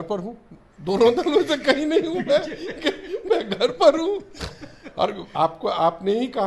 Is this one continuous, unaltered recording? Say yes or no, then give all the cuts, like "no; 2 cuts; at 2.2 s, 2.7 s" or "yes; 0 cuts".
yes; 0 cuts